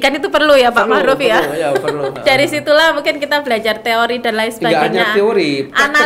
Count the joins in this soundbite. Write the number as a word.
one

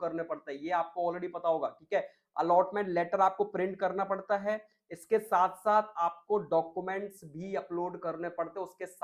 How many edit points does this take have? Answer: zero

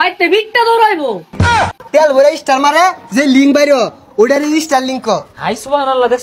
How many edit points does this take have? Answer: one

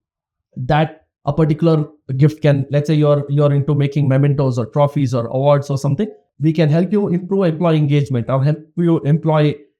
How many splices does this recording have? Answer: one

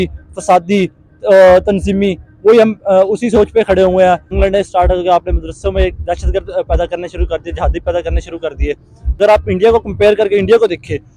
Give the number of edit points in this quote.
two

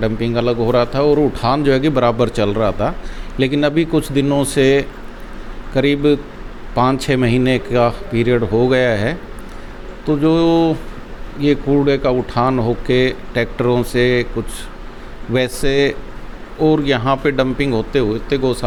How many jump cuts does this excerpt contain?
zero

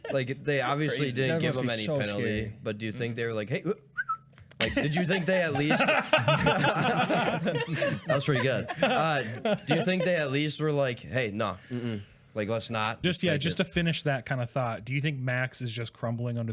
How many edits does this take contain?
one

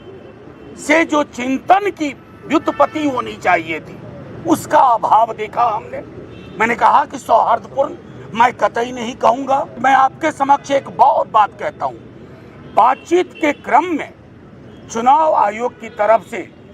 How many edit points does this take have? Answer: one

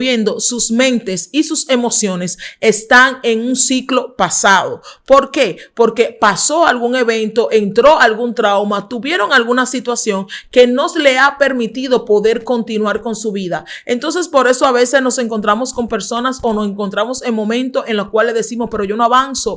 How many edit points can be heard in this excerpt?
zero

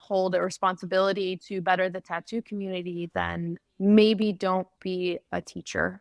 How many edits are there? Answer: zero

